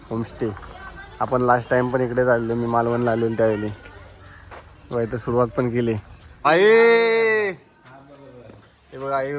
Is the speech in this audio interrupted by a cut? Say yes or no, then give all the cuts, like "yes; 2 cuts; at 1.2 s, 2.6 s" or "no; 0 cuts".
yes; 1 cut; at 6.5 s